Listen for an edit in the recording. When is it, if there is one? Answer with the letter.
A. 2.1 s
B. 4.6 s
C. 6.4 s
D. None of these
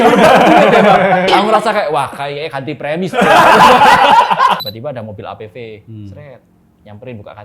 B